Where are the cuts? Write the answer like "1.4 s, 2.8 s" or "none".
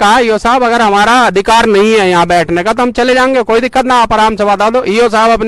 none

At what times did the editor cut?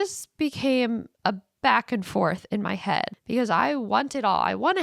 3.2 s

